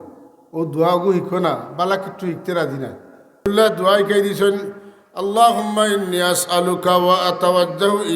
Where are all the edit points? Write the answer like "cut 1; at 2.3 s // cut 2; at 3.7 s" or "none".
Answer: cut 1; at 3.5 s